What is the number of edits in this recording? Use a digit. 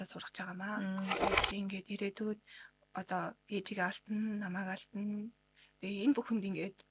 0